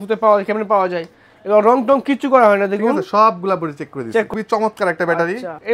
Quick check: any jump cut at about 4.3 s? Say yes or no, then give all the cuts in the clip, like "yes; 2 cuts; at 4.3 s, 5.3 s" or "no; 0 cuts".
yes; 1 cut; at 4.3 s